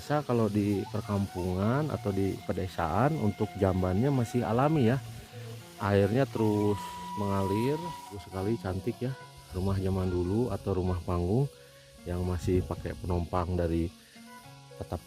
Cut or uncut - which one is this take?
cut